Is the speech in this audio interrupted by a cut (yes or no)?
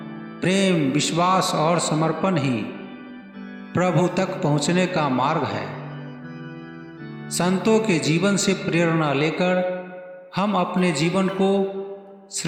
no